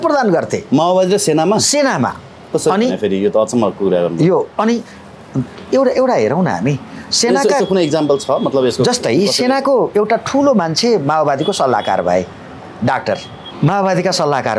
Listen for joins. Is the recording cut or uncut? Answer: uncut